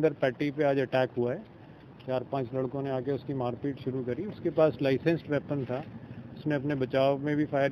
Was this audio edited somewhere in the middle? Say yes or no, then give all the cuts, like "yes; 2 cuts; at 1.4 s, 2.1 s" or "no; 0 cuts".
no; 0 cuts